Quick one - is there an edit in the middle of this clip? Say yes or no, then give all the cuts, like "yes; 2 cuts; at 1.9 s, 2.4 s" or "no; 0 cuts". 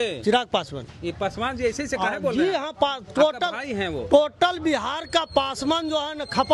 no; 0 cuts